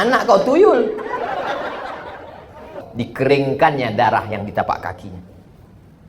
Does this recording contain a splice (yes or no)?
yes